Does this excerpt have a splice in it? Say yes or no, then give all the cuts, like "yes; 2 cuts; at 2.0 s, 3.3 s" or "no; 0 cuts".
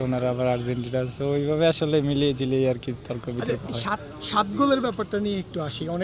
no; 0 cuts